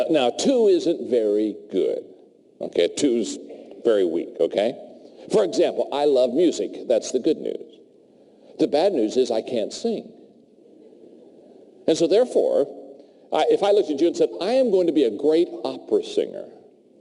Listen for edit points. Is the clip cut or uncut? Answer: uncut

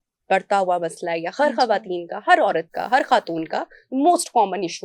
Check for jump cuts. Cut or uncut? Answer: uncut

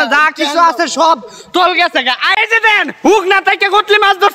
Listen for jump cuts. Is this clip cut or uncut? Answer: cut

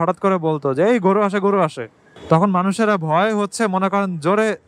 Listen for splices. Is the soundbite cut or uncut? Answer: uncut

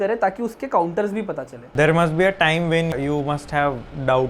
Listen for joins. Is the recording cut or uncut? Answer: cut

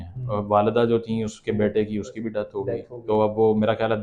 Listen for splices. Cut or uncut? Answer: uncut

